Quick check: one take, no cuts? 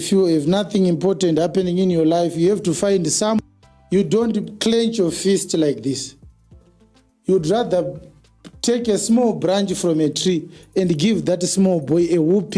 no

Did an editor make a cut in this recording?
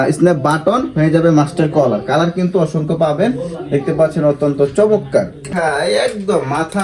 no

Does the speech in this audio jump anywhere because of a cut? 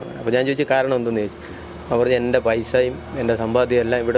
no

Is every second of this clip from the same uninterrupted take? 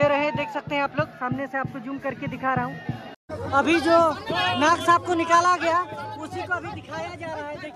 no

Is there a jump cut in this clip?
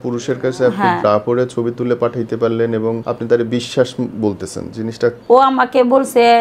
yes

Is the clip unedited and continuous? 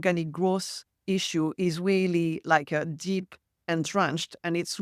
yes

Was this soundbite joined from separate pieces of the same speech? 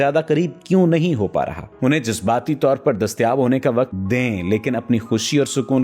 yes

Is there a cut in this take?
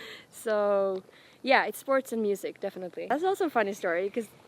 yes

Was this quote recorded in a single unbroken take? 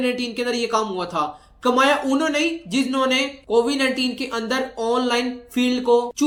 yes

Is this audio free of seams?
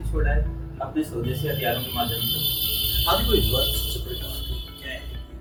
yes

